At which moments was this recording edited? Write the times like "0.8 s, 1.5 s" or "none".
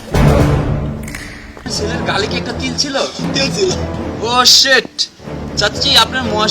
1.6 s